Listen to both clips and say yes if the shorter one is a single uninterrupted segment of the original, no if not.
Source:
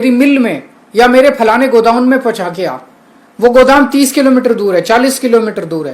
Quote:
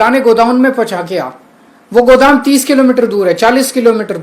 yes